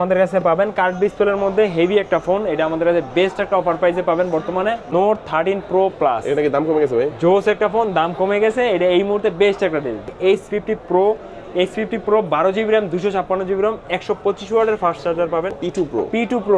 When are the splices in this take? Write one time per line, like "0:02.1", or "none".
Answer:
0:04.8
0:10.1
0:15.6

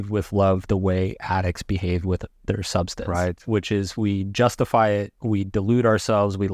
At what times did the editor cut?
none

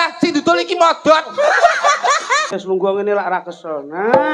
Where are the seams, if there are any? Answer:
0:02.5

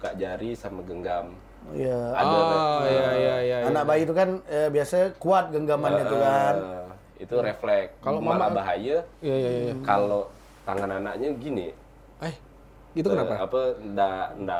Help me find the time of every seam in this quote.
none

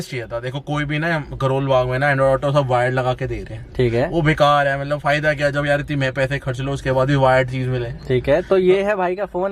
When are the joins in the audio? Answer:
none

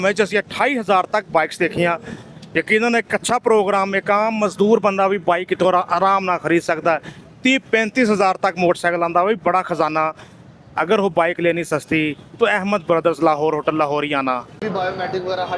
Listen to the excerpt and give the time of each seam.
0:14.6

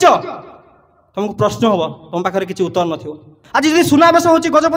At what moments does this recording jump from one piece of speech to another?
0:03.3

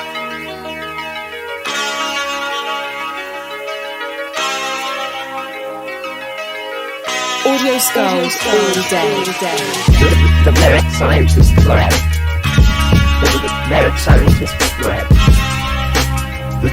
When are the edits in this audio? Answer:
none

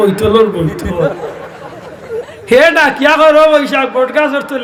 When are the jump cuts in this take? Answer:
none

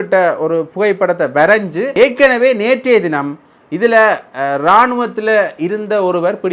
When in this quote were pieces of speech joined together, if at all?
0:01.9

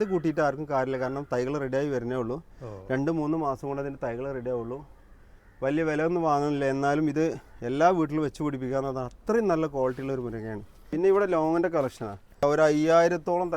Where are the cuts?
0:10.8
0:12.4

